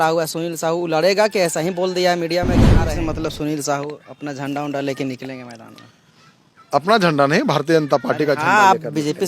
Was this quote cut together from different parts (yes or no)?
yes